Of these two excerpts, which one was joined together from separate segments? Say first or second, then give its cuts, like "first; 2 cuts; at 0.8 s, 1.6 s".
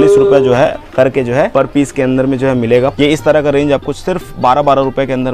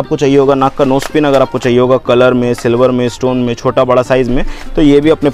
first; 2 cuts; at 1.5 s, 2.9 s